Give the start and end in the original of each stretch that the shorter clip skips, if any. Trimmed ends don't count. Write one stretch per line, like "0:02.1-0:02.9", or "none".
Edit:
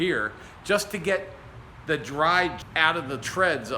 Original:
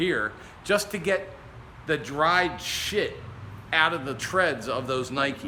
0:02.7-0:03.6

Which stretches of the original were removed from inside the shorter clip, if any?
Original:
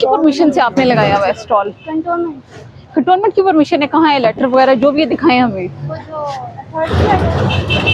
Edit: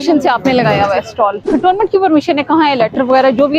0:01.7-0:02.8

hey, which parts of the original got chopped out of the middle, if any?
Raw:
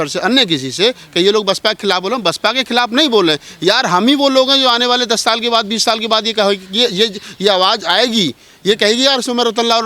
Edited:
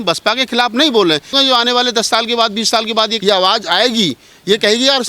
0:03.5-0:04.5
0:06.3-0:07.3

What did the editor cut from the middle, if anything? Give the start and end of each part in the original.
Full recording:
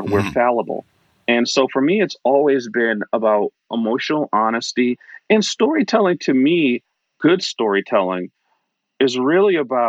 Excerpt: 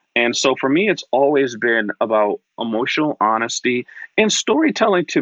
none

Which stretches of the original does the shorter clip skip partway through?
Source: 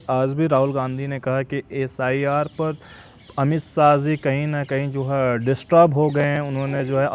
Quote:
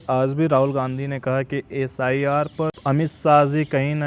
0:02.8-0:03.3

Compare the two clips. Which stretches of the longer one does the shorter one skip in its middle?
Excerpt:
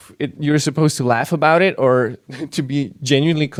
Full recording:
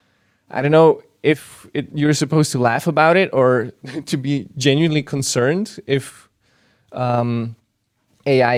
none

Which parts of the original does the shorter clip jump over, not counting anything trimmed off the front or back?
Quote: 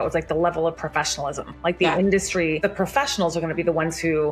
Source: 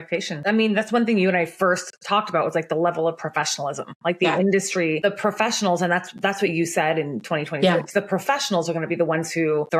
0:05.0-0:07.9

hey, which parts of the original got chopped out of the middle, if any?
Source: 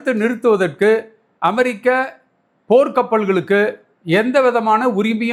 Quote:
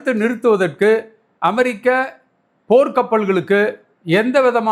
none

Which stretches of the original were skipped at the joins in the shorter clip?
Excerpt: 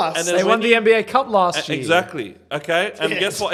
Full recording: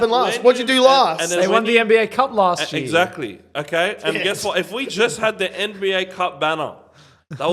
none

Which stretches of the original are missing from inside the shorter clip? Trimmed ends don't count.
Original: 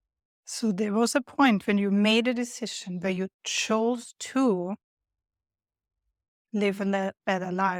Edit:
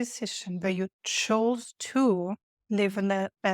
0:04.9-0:06.3

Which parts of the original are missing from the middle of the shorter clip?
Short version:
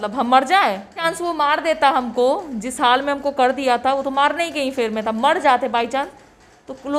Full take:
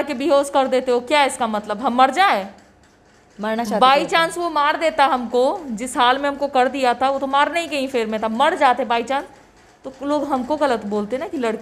0:02.7-0:04.2

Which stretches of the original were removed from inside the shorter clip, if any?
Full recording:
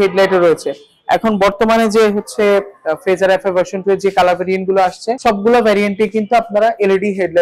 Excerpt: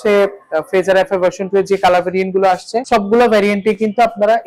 none

